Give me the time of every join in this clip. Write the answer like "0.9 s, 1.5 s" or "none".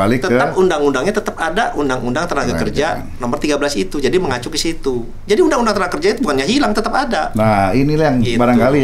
none

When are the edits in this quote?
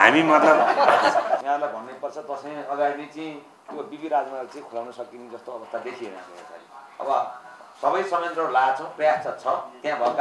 1.4 s

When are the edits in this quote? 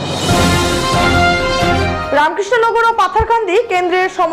1.9 s

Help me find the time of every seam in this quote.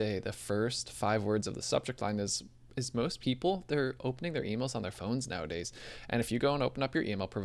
none

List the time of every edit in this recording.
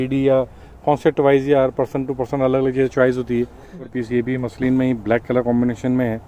3.8 s

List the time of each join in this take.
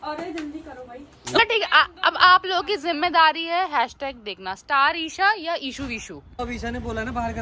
1.4 s, 6.4 s

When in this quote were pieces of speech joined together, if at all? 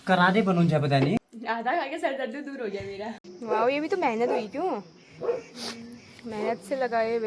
1.2 s, 3.3 s

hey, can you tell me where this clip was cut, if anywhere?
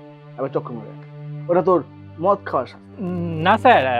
2.7 s

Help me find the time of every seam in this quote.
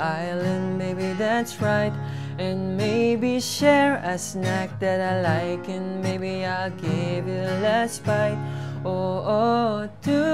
none

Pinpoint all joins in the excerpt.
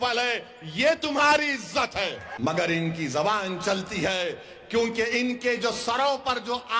2.2 s

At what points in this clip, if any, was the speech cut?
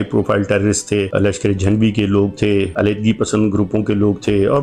1.1 s, 2.7 s

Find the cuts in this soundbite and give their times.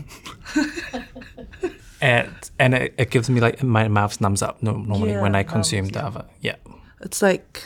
none

